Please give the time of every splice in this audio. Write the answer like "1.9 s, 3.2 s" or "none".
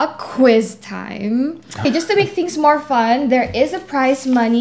1.8 s